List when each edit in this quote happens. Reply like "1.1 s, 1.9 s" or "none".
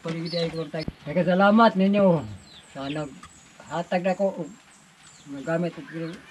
0.9 s